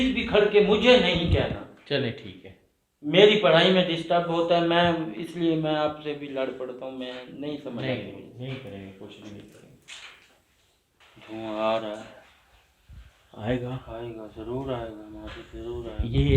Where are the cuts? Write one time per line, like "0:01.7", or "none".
0:11.0